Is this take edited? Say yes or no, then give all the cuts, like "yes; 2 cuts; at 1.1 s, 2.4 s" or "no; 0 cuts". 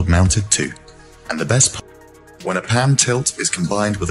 no; 0 cuts